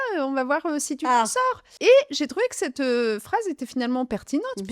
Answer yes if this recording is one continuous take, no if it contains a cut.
no